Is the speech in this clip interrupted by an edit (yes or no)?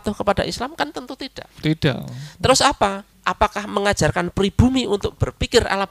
yes